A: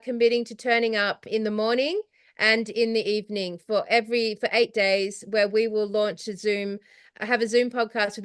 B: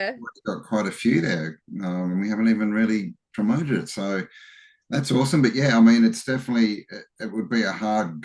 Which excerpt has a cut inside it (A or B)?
A